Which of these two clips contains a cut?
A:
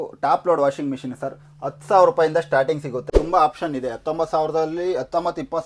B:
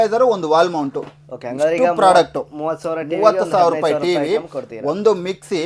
A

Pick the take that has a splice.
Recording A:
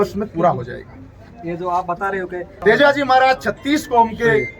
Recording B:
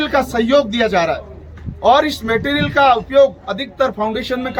A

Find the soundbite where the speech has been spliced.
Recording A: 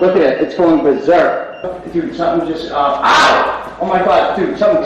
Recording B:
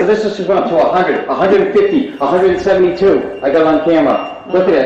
A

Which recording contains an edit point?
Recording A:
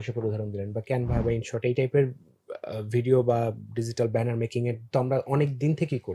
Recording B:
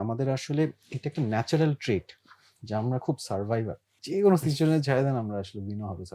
B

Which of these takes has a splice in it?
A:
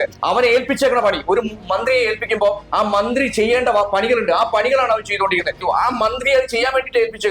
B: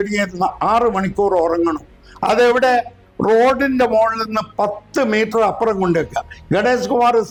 A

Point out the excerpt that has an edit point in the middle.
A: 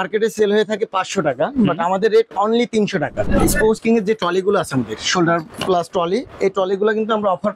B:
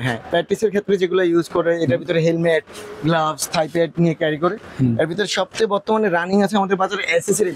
A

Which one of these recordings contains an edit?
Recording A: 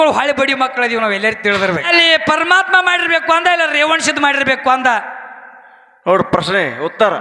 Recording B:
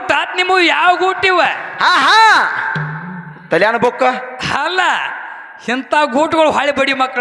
A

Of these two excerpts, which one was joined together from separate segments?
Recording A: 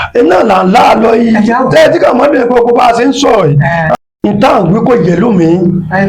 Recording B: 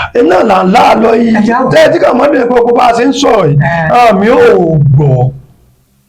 A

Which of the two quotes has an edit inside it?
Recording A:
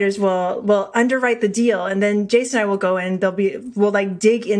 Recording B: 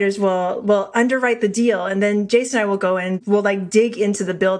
B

